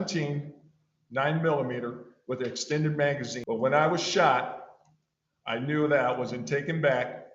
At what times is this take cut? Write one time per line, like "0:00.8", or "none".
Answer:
0:03.4